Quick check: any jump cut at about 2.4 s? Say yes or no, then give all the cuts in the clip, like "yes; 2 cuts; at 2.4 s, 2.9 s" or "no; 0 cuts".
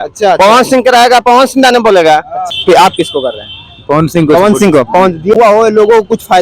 yes; 2 cuts; at 2.4 s, 5.4 s